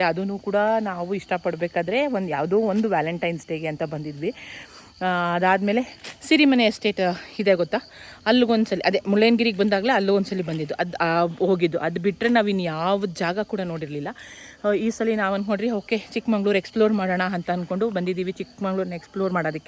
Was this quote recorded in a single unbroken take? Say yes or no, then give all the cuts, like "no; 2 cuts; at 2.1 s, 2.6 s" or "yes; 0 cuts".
yes; 0 cuts